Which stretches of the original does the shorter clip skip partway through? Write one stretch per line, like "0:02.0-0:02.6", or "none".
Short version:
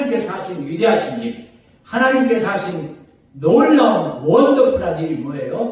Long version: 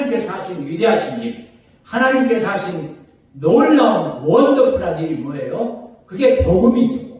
none